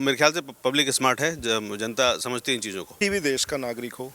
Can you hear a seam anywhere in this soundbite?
yes; 1 cut; at 2.9 s

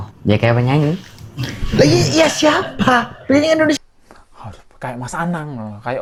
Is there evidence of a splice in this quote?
no; 0 cuts

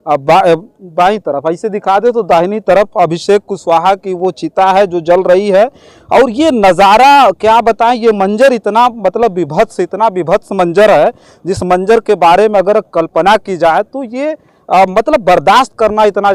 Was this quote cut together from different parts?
no; 0 cuts

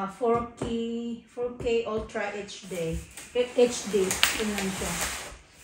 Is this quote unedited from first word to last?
yes; 0 cuts

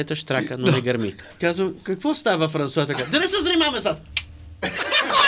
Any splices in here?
yes; 1 cut; at 1.2 s

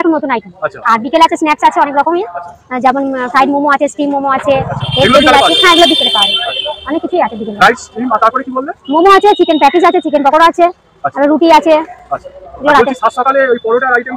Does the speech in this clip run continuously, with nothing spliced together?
yes; 0 cuts

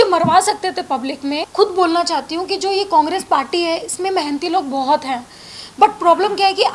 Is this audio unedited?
no; 1 cut; at 1.5 s

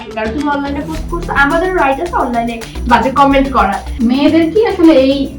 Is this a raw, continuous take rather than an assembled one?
no; 1 cut; at 3.9 s

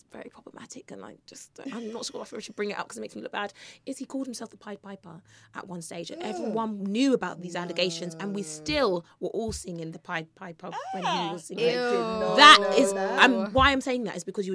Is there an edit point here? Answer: no; 0 cuts

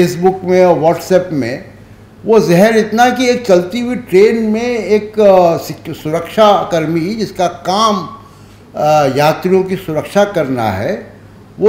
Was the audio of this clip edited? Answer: no; 0 cuts

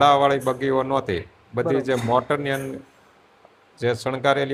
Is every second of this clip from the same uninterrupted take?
yes; 0 cuts

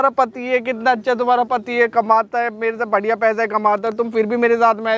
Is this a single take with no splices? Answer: yes; 0 cuts

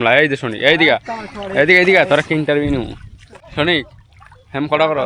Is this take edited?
no; 0 cuts

